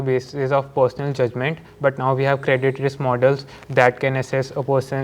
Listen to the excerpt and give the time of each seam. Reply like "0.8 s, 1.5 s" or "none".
none